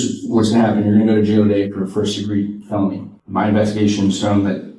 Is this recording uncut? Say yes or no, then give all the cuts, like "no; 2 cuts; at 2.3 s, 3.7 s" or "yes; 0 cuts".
no; 1 cut; at 3.1 s